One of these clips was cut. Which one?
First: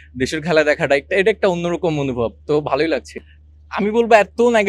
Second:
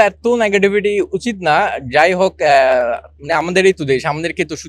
first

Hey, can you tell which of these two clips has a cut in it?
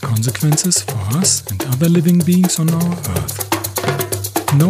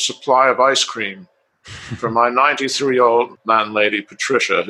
second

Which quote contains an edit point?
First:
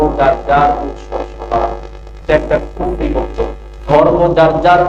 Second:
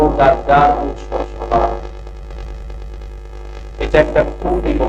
first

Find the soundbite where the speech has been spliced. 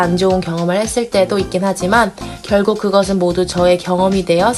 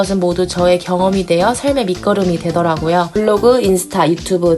second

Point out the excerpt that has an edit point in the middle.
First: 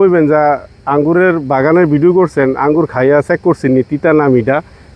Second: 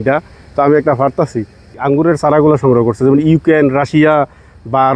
second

